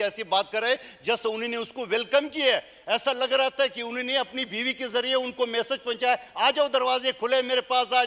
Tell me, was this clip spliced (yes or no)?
no